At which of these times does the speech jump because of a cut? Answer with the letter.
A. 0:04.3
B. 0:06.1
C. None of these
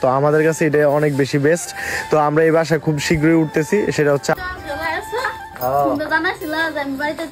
A